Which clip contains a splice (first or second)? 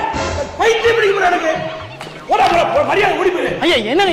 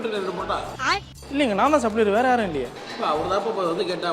second